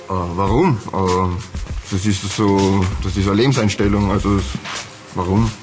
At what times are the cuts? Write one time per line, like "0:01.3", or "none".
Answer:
none